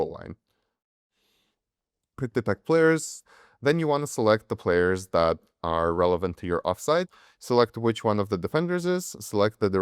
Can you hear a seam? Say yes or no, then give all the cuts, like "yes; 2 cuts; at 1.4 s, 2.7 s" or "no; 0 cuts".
yes; 3 cuts; at 0.9 s, 3.2 s, 7.1 s